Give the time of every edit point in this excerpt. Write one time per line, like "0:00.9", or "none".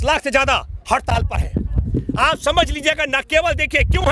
none